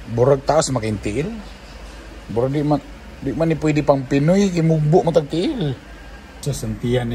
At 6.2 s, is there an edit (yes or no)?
yes